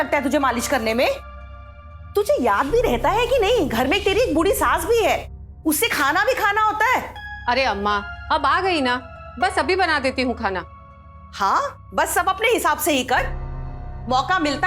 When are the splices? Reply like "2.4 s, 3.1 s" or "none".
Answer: none